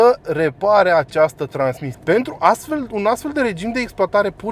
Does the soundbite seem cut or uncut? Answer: cut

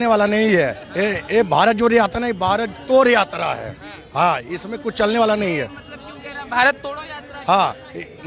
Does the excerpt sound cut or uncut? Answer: uncut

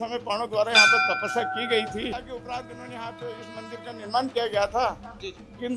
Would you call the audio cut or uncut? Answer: cut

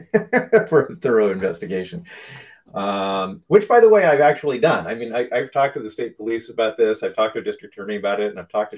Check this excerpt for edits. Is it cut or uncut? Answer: uncut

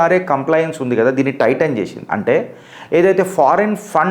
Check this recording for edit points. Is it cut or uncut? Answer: uncut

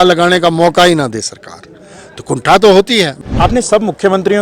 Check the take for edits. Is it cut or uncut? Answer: cut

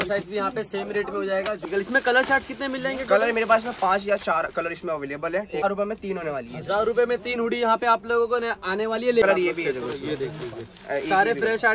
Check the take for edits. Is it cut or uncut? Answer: cut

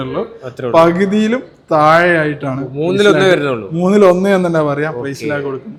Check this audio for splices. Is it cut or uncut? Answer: uncut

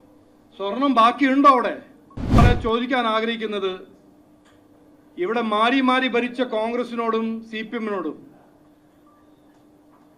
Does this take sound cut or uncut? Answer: cut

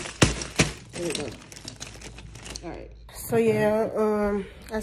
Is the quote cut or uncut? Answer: cut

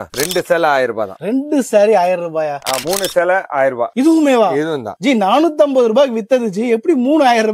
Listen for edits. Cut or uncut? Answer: cut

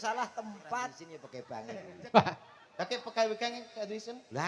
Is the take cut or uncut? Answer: cut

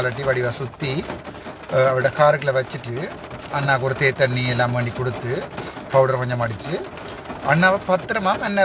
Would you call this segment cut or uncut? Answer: uncut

